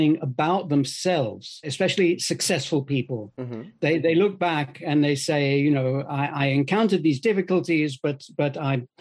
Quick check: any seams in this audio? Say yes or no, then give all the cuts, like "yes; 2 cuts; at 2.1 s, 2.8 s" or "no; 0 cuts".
yes; 1 cut; at 1.7 s